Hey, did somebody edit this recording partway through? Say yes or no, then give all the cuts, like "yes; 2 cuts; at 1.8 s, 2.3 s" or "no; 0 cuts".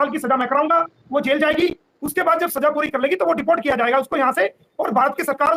no; 0 cuts